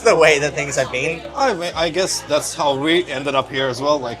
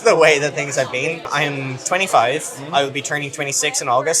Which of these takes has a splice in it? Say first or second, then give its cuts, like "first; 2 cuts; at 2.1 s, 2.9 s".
second; 1 cut; at 1.3 s